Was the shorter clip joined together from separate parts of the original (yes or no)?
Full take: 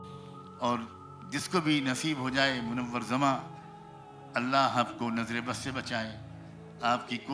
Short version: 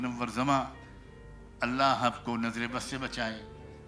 no